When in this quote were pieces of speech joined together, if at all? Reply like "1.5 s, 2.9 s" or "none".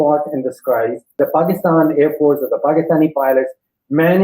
1.2 s